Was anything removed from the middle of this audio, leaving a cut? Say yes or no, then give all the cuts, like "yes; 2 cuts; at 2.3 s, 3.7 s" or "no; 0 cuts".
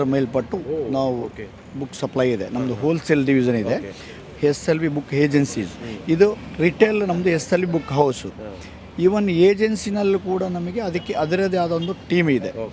no; 0 cuts